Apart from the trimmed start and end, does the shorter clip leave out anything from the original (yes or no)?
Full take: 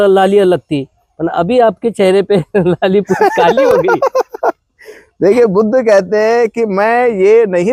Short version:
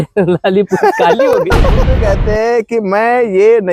yes